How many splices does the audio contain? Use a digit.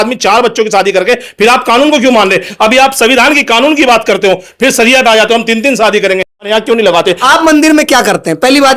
1